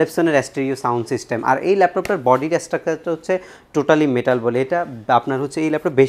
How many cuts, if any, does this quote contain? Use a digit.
0